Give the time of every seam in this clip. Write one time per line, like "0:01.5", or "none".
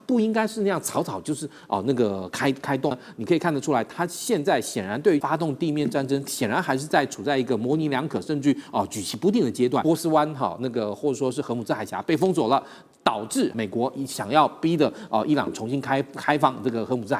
0:03.0
0:05.2
0:09.8
0:13.5